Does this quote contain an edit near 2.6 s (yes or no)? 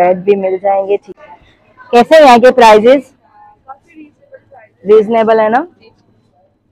no